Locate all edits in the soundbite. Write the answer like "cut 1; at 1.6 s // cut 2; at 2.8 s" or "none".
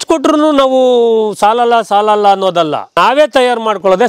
cut 1; at 2.9 s